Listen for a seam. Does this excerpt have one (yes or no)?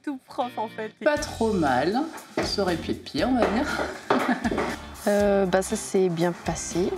yes